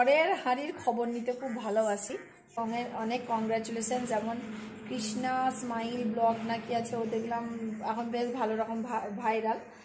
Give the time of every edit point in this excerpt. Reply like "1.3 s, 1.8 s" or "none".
2.5 s